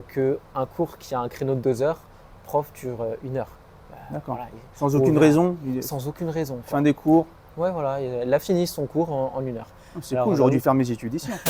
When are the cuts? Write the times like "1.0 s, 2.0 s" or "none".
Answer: none